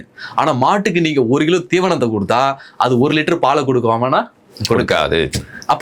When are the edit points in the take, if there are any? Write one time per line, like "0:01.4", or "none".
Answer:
none